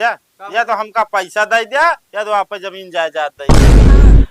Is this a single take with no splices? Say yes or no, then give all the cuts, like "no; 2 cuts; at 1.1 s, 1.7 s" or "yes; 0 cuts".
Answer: no; 1 cut; at 3.4 s